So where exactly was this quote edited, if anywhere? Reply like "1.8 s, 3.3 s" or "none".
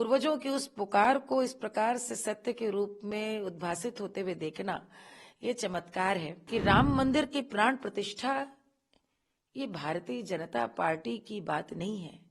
6.4 s

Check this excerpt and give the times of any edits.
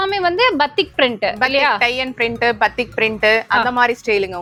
none

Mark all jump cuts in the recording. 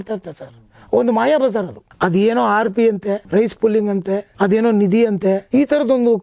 1.8 s, 3.2 s, 4.3 s, 5.4 s

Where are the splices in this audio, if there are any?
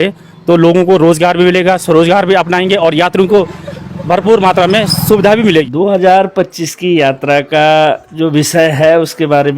5.6 s

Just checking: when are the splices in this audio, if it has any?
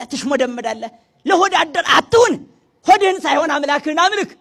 none

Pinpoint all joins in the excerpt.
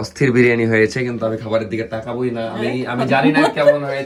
none

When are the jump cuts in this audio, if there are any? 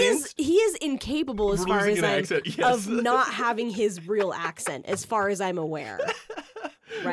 none

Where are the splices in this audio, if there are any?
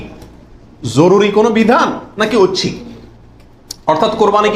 none

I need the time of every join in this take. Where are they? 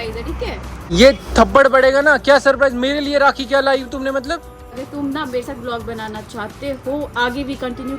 0.9 s, 4.7 s

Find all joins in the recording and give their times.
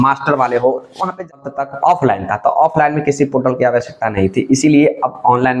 1.3 s

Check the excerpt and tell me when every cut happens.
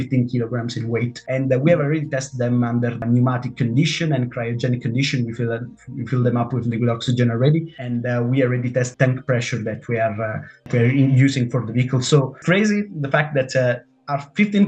1.2 s, 3.0 s, 7.8 s, 8.9 s, 10.6 s, 12.4 s

